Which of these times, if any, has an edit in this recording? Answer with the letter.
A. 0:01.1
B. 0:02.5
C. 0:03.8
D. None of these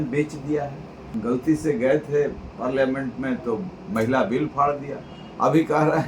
A